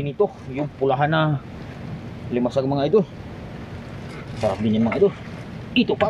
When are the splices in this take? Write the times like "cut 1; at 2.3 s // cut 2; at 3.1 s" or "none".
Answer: none